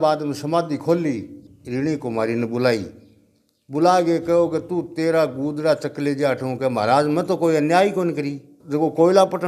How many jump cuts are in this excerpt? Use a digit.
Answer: 2